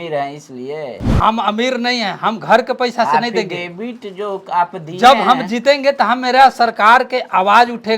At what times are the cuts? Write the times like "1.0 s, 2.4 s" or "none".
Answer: 1.0 s